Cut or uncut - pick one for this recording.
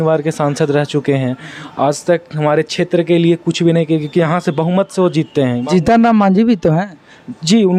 uncut